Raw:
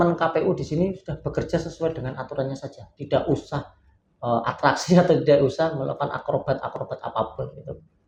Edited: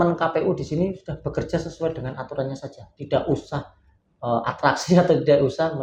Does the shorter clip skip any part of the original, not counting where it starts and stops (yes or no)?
no